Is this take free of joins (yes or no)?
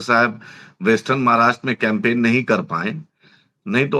yes